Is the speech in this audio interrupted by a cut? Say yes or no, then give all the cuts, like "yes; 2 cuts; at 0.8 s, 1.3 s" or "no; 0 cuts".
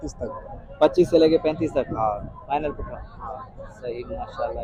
no; 0 cuts